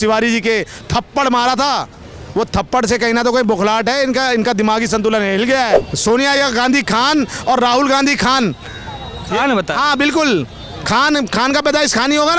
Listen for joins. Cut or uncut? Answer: cut